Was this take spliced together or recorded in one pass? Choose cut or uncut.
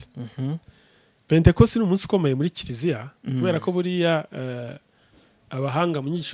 uncut